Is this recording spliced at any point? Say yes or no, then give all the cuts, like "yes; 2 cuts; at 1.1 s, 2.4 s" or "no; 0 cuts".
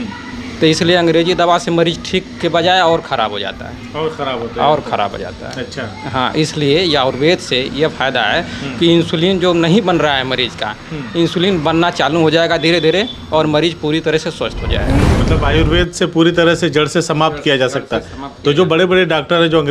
yes; 1 cut; at 15.1 s